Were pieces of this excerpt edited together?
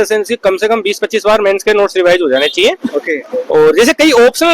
no; 0 cuts

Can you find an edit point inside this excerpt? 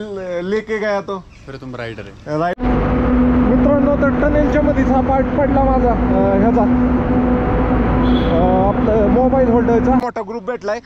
yes; 2 cuts; at 2.6 s, 10.0 s

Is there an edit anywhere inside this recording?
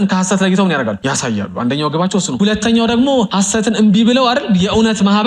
yes; 3 cuts; at 1.0 s, 2.3 s, 3.3 s

